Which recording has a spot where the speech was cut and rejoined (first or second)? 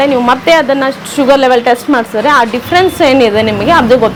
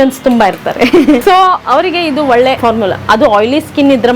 second